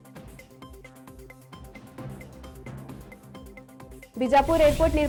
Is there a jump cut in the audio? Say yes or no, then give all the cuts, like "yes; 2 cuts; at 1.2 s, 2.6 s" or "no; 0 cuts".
no; 0 cuts